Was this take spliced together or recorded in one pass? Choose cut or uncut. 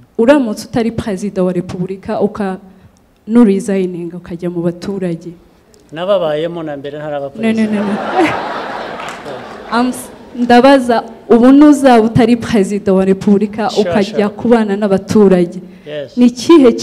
uncut